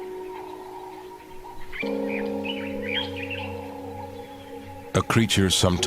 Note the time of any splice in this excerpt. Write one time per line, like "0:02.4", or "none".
0:02.0